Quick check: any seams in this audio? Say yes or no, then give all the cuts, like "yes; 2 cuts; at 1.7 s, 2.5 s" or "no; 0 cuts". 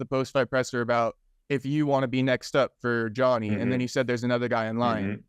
no; 0 cuts